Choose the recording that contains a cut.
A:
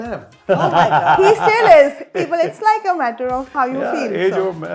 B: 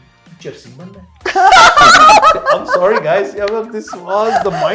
A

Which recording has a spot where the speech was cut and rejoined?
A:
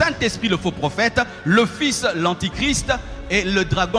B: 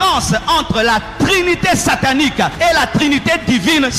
B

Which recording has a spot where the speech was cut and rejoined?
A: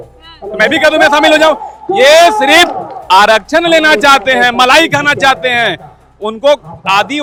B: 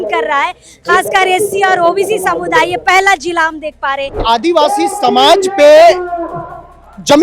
B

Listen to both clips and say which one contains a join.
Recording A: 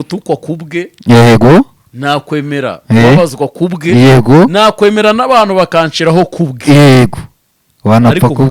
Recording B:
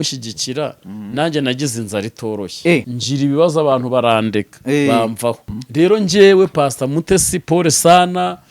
B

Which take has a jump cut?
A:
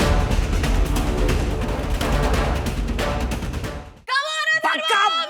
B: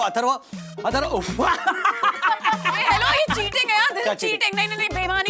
A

